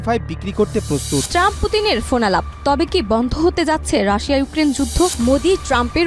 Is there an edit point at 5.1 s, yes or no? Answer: yes